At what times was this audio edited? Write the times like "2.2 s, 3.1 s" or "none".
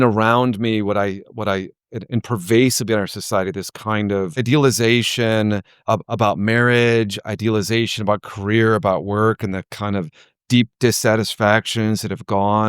4.5 s, 5.7 s